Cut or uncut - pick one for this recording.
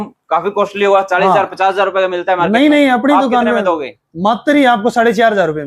uncut